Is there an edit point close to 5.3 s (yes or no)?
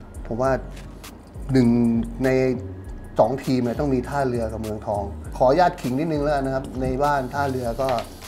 yes